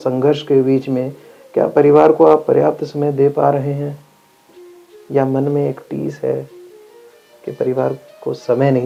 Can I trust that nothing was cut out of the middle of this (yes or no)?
yes